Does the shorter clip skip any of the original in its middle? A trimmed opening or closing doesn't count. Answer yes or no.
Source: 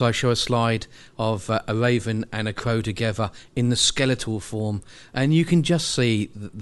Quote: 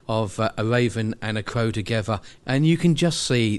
yes